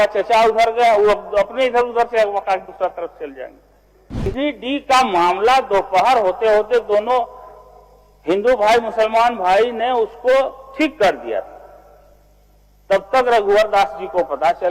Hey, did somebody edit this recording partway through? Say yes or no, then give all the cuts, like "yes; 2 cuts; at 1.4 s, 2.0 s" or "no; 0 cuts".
yes; 1 cut; at 4.3 s